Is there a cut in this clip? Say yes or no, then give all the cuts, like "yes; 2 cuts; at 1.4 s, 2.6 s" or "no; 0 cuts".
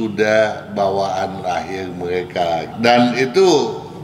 yes; 1 cut; at 2.7 s